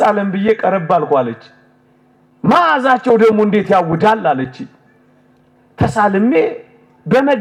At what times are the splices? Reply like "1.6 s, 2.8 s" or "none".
none